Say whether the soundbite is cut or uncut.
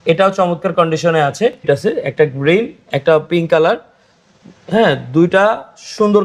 cut